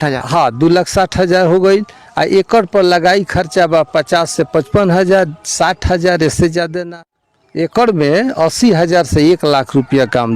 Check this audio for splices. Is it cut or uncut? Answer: cut